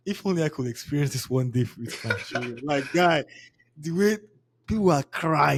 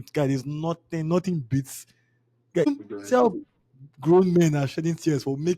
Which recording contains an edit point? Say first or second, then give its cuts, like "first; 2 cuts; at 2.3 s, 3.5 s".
second; 1 cut; at 2.7 s